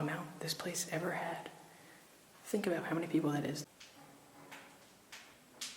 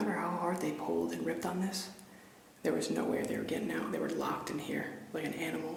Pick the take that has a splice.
first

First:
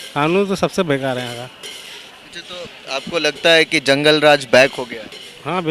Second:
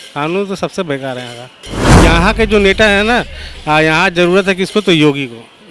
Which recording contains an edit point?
second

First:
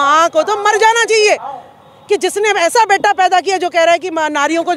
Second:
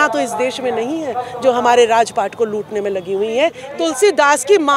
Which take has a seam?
second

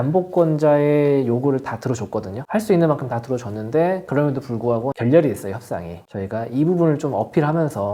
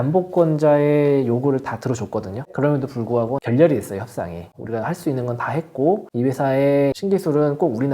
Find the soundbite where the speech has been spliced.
second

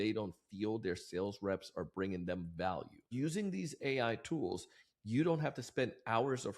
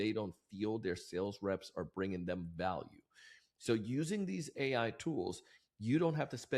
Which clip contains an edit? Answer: first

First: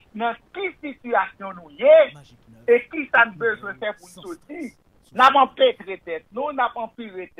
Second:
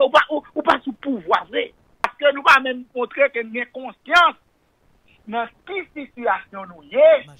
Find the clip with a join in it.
second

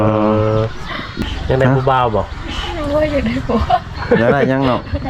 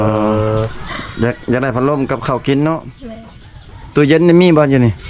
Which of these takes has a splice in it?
first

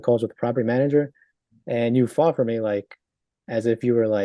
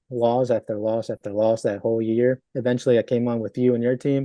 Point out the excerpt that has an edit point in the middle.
second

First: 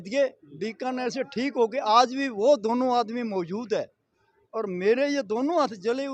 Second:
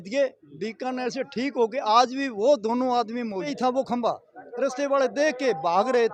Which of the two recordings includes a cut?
second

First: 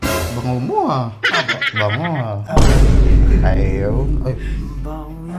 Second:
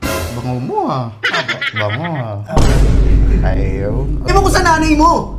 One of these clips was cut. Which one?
second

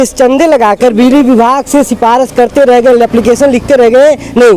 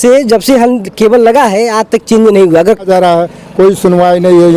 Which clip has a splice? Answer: second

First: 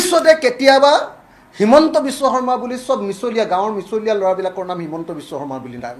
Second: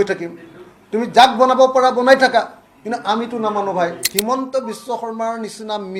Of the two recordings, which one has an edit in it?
second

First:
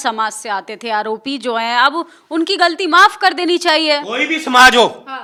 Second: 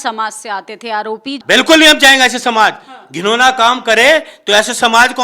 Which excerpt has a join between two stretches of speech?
second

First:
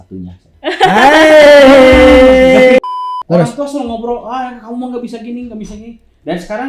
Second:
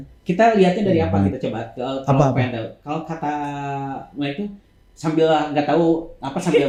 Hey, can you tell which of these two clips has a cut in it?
first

